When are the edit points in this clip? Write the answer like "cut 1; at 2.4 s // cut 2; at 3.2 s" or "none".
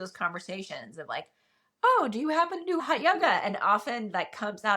cut 1; at 2.8 s